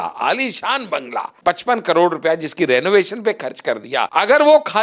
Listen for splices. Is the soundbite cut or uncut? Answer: cut